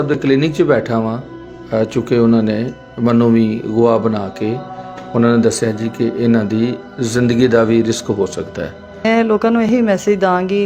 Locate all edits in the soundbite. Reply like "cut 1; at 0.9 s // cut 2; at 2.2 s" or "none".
cut 1; at 9.0 s